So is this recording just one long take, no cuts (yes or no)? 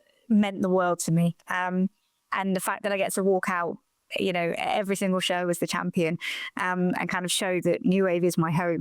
yes